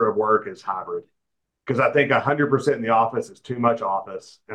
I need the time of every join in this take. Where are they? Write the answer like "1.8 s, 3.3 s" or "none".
none